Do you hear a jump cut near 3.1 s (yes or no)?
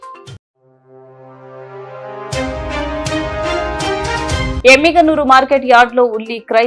no